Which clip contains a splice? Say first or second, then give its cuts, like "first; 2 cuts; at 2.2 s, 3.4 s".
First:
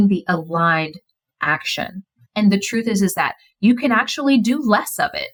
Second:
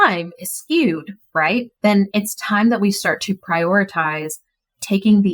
second; 1 cut; at 1.7 s